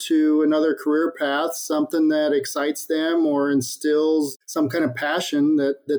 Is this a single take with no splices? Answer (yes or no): no